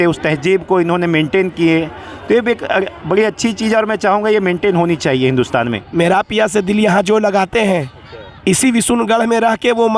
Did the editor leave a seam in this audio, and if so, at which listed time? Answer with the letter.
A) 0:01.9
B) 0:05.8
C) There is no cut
B